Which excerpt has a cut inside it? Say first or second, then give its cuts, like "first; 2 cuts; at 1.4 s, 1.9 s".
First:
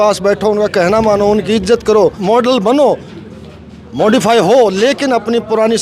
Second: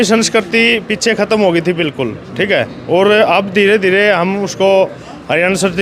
first; 1 cut; at 2.2 s